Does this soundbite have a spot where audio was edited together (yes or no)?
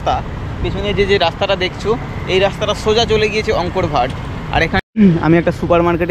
yes